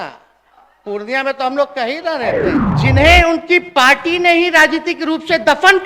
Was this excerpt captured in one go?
no; 1 cut; at 2.7 s

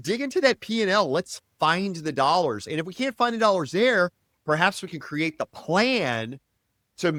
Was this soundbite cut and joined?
no; 0 cuts

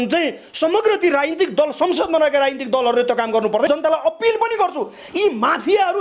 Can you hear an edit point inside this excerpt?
yes; 1 cut; at 3.7 s

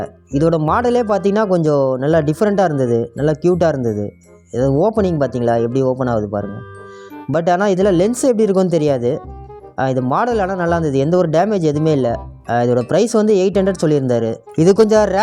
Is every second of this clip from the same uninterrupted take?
yes; 0 cuts

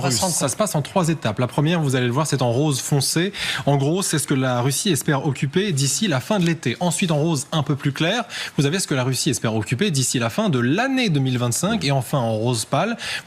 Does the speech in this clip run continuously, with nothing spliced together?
yes; 0 cuts

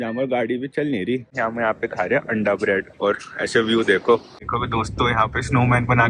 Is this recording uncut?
no; 2 cuts; at 1.3 s, 4.4 s

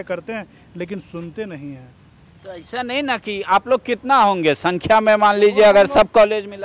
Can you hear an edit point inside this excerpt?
no; 0 cuts

